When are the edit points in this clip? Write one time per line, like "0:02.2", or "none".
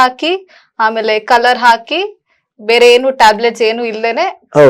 none